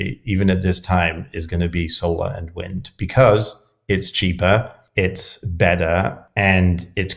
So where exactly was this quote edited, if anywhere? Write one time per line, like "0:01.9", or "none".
0:04.8
0:06.2